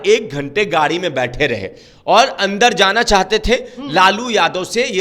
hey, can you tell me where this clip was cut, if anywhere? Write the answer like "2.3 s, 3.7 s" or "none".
none